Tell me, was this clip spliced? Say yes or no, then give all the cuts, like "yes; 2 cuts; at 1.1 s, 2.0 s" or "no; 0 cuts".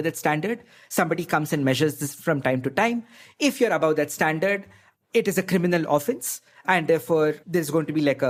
no; 0 cuts